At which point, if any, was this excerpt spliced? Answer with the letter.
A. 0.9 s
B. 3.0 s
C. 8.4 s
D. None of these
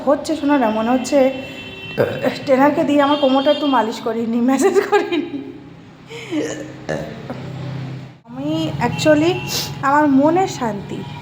C